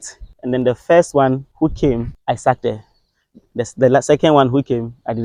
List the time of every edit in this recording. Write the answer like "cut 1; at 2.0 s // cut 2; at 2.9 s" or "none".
none